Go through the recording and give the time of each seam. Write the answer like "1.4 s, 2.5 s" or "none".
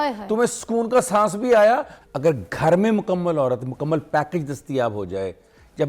2.0 s